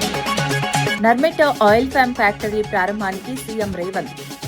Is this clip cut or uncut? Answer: cut